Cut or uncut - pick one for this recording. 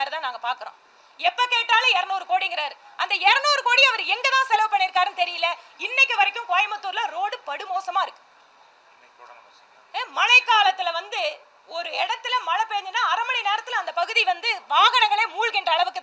uncut